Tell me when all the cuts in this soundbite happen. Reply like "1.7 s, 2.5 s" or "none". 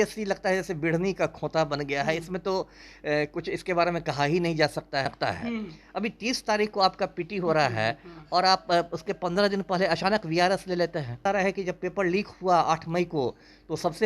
5.0 s, 11.2 s